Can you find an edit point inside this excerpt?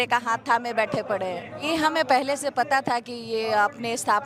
yes; 1 cut; at 1.5 s

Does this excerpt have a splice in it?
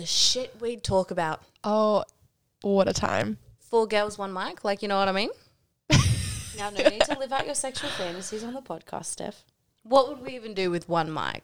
no; 0 cuts

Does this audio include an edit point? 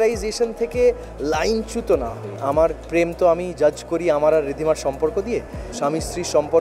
yes; 2 cuts; at 2.4 s, 5.7 s

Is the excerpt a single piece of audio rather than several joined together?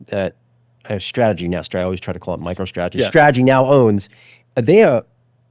yes; 0 cuts

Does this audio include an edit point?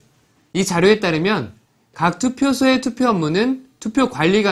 no; 0 cuts

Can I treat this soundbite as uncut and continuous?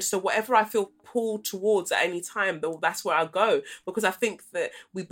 yes; 0 cuts

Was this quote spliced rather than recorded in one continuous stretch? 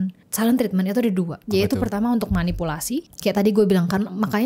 yes; 2 cuts; at 1.4 s, 3.1 s

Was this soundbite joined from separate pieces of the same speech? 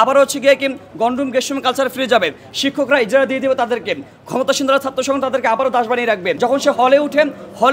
yes; 1 cut; at 6.4 s

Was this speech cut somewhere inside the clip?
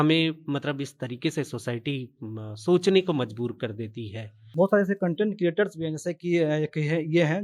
yes; 1 cut; at 4.5 s

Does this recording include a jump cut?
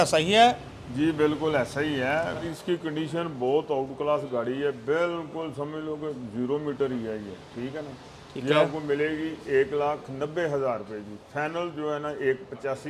yes; 1 cut; at 2.5 s

